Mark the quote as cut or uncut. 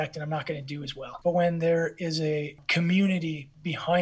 cut